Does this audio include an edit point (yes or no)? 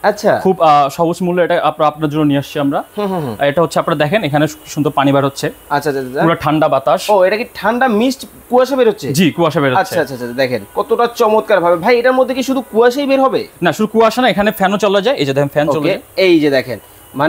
no